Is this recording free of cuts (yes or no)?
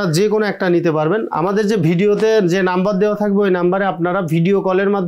no